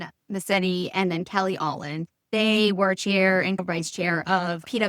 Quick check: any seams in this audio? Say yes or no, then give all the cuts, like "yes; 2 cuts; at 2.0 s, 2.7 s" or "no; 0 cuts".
yes; 2 cuts; at 2.3 s, 3.6 s